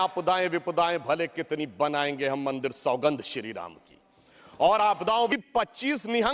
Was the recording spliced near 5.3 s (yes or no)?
yes